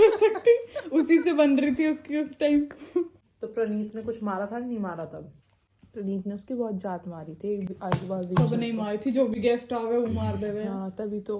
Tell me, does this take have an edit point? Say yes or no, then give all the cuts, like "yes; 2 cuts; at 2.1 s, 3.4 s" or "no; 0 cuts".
no; 0 cuts